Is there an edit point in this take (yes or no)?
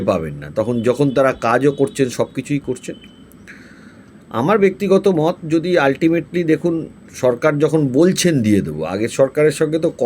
no